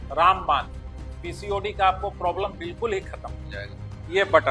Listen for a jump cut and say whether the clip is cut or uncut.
uncut